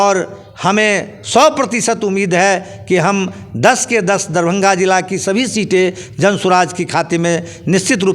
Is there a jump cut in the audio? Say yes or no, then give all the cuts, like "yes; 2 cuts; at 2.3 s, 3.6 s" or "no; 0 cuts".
no; 0 cuts